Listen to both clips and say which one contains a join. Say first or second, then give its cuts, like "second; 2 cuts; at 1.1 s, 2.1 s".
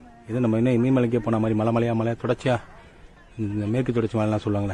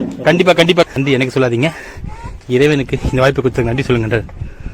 second; 1 cut; at 0.9 s